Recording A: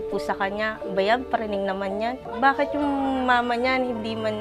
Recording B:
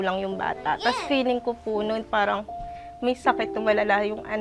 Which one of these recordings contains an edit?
A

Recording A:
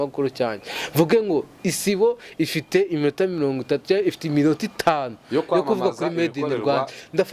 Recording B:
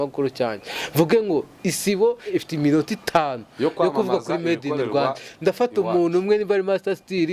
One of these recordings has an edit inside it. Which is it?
B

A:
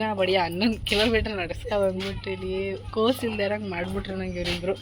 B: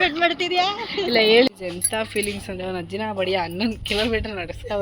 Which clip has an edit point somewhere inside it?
B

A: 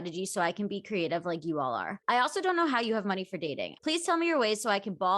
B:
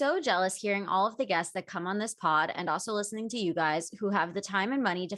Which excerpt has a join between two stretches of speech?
A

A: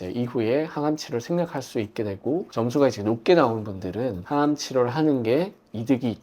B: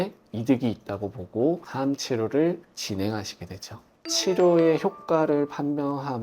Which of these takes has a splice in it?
B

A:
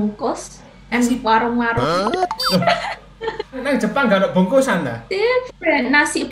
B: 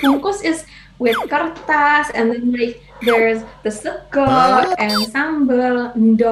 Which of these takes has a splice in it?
A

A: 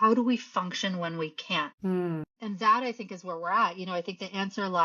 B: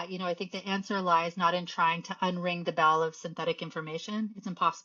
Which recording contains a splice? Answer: A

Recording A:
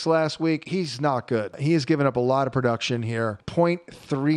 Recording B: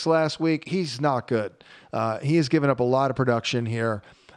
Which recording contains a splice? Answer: A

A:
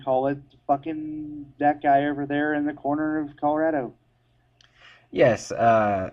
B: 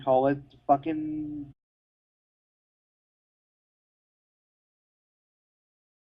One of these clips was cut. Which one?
A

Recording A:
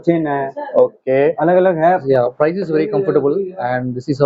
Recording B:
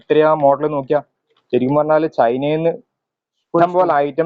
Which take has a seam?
A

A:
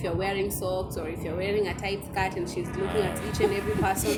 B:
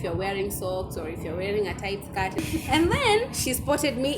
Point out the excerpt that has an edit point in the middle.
B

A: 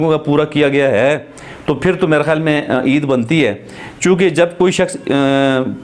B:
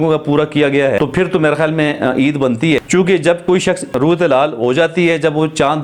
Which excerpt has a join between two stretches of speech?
B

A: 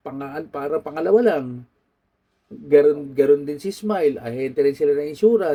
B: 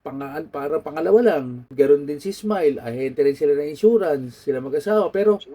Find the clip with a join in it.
B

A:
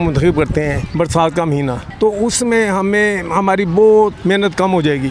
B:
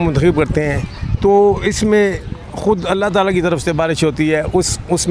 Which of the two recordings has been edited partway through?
A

